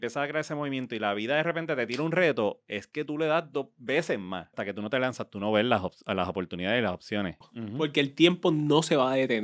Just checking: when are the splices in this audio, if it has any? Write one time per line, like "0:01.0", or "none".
0:04.6
0:07.4